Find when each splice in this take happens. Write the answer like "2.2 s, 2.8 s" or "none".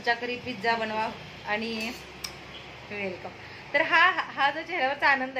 0.9 s